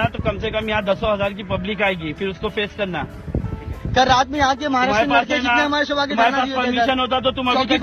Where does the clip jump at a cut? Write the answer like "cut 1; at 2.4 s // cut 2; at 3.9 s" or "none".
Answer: none